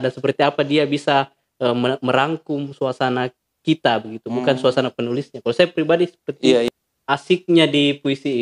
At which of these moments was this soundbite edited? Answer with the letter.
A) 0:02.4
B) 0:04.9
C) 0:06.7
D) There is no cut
C